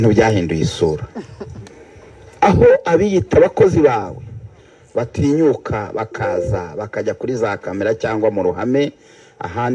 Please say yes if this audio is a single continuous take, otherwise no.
yes